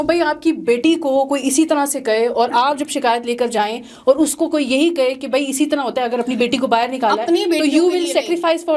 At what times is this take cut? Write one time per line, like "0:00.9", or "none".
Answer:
none